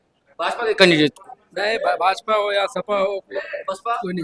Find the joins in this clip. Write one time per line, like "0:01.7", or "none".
none